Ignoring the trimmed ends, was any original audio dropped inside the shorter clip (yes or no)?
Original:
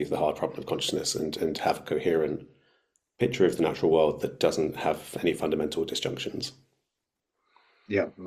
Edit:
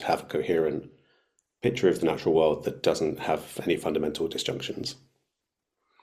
no